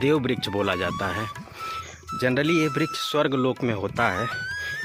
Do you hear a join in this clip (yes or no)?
no